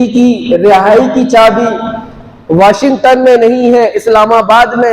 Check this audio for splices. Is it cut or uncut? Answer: uncut